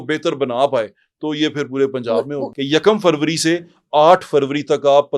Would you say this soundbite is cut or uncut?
cut